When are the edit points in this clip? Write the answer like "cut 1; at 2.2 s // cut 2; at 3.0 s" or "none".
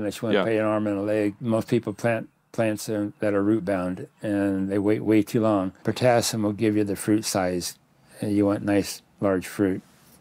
cut 1; at 1.4 s // cut 2; at 5.8 s